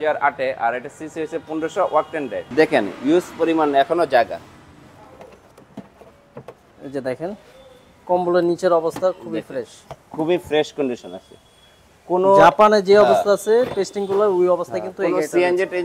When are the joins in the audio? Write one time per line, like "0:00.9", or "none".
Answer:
0:02.5